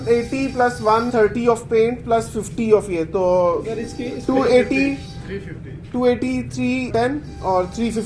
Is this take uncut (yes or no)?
no